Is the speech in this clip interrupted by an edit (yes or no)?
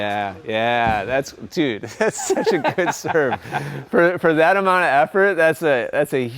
no